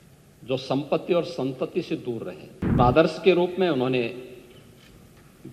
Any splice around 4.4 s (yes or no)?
no